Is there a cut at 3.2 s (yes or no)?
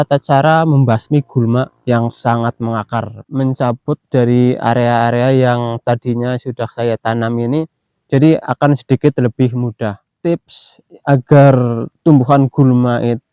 yes